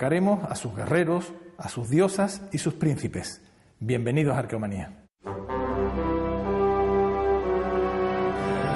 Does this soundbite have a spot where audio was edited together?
yes; 1 cut; at 7.6 s

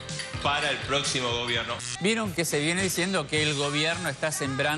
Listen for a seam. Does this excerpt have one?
yes; 1 cut; at 1.8 s

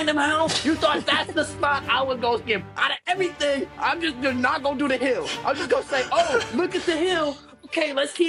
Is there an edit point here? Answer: no; 0 cuts

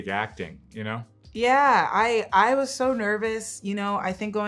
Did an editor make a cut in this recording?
no; 0 cuts

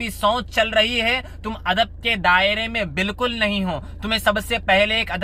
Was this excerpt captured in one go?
yes; 0 cuts

